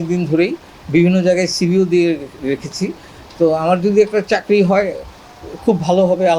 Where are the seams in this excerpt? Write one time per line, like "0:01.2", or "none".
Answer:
none